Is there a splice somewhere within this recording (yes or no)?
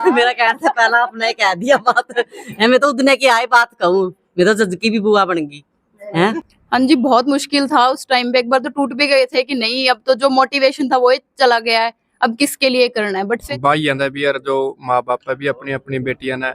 yes